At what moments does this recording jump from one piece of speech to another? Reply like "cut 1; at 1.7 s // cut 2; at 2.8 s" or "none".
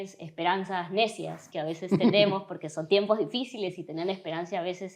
none